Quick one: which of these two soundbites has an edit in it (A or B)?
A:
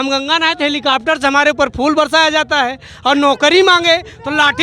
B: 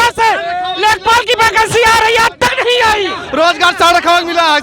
B